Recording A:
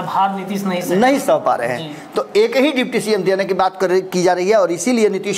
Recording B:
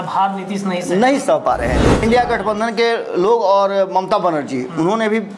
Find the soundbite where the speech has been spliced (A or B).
B